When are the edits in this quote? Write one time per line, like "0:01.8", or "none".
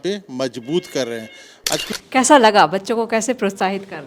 0:01.9

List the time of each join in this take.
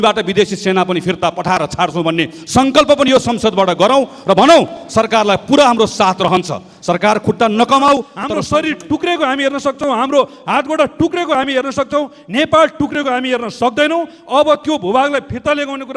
0:08.2

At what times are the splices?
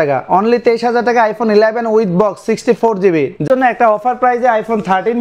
0:03.5

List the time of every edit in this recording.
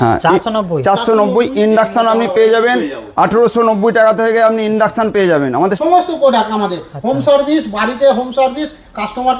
0:05.8

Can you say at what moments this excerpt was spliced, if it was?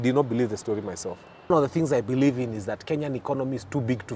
0:01.5

